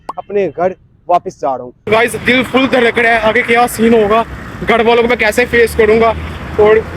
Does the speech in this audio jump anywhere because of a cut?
yes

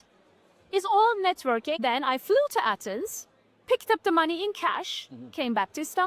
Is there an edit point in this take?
yes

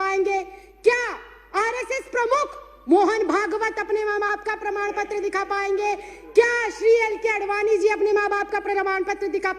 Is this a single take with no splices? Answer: yes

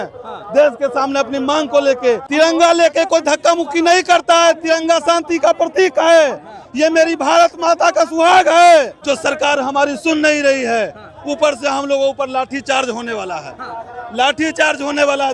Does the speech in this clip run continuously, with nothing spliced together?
no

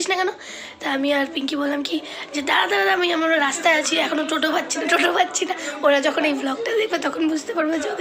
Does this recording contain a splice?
no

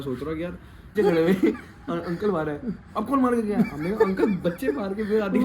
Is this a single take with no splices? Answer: no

